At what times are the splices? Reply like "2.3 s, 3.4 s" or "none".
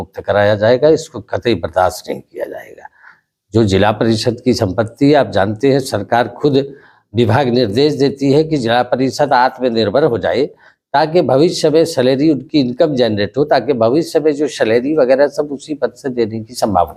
none